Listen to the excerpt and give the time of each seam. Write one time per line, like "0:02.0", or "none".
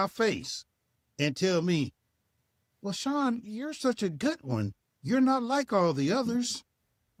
none